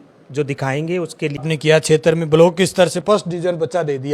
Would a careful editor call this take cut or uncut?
cut